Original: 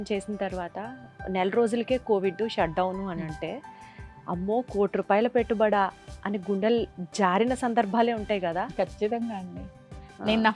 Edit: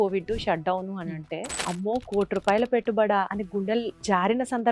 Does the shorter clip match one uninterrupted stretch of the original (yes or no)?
no